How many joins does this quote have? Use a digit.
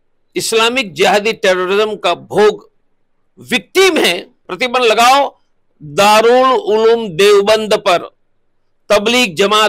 1